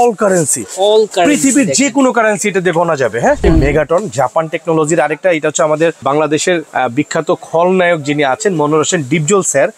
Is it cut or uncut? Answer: cut